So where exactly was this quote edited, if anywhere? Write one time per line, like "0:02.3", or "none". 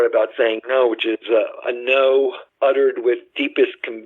0:02.4